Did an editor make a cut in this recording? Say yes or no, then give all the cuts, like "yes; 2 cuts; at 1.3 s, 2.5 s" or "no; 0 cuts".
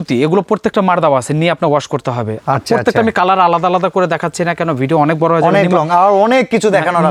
no; 0 cuts